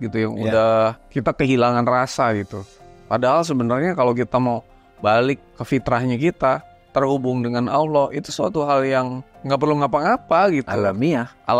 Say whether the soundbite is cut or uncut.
cut